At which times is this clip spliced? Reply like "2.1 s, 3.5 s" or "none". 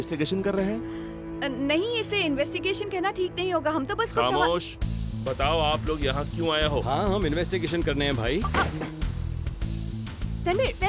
none